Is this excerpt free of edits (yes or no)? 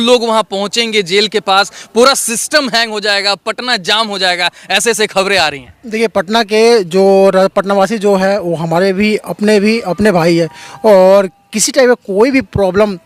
yes